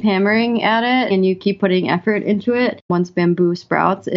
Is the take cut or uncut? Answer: cut